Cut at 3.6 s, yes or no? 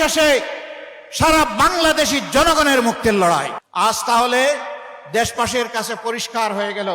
yes